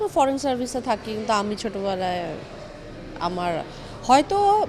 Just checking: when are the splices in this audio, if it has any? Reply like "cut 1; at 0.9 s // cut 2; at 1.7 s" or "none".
none